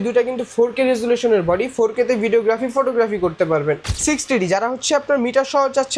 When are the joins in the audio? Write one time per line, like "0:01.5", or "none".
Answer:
0:03.8